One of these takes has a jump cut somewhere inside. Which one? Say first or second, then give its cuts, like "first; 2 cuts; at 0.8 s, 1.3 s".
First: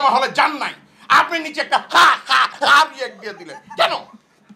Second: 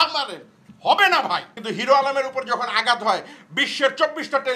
second; 1 cut; at 1.6 s